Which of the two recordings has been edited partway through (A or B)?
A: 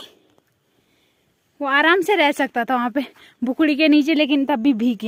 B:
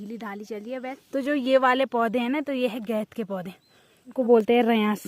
B